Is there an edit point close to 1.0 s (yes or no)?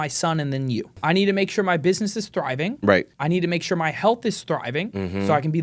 yes